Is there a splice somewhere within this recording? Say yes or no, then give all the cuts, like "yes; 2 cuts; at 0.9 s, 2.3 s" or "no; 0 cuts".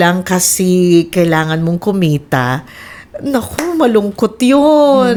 no; 0 cuts